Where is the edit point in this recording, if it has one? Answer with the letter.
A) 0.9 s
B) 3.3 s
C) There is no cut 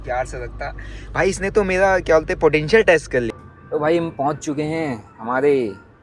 B